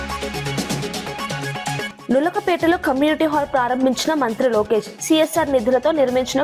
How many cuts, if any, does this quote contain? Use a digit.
0